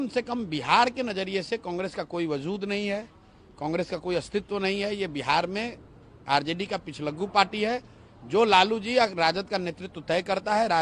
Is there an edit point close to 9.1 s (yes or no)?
no